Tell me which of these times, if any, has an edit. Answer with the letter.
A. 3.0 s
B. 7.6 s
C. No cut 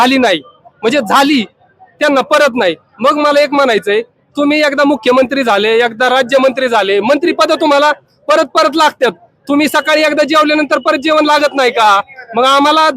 C